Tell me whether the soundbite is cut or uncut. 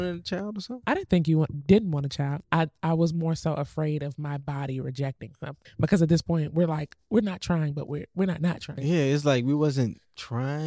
cut